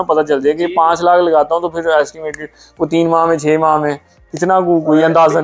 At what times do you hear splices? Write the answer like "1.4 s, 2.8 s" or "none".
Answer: none